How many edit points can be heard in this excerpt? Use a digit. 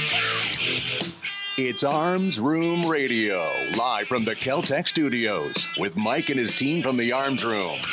1